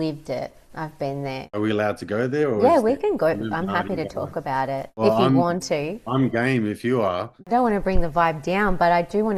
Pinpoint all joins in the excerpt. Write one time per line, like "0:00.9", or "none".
0:01.6
0:04.9
0:07.5